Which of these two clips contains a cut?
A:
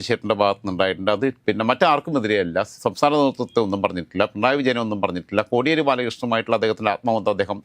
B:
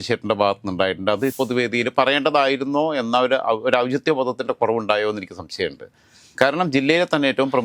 B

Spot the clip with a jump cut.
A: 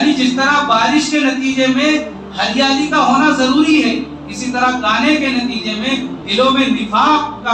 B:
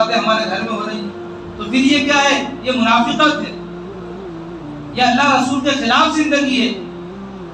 B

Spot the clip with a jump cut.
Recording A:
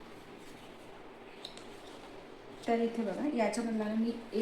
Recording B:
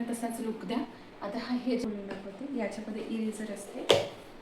B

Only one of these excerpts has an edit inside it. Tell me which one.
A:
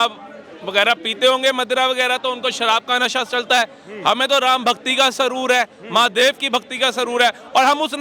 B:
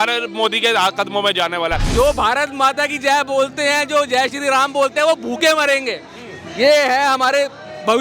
B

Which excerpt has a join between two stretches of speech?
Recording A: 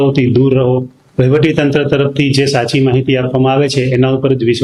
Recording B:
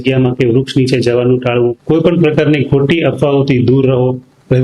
B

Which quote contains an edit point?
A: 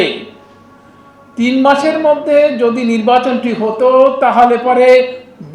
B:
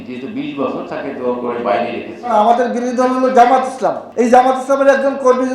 B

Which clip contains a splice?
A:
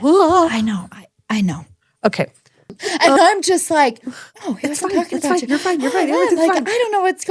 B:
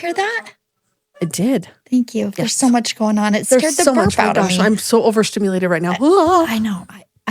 A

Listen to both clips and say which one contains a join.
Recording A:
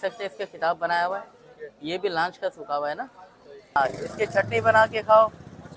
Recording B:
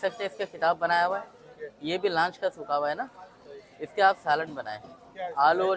A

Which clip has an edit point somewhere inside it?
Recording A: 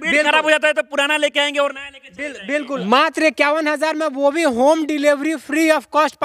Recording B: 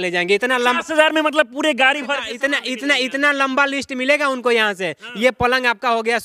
A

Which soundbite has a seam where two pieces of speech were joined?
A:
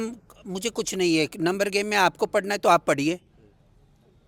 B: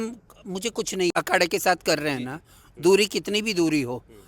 B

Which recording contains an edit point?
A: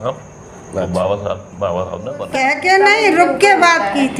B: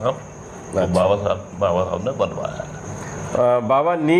A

